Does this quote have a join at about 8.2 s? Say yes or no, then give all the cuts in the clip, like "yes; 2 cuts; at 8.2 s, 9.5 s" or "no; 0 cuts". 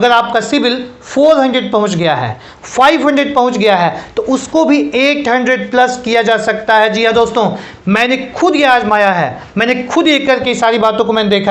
no; 0 cuts